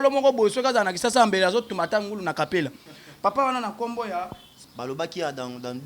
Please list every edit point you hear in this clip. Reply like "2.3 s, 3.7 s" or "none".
4.6 s